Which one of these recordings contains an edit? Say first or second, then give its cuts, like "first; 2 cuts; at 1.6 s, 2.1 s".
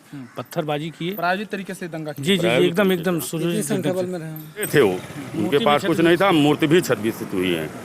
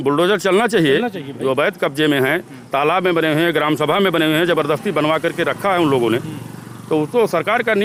first; 1 cut; at 4.7 s